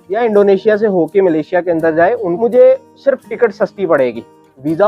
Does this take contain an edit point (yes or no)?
yes